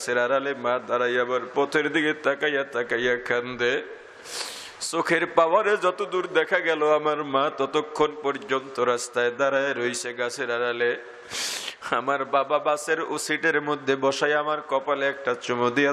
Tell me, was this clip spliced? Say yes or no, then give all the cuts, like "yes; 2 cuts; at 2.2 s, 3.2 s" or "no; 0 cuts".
no; 0 cuts